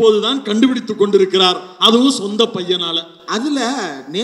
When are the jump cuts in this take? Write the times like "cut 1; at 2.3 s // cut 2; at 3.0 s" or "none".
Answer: none